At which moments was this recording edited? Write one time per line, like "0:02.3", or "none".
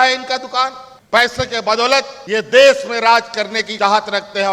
0:02.2
0:03.6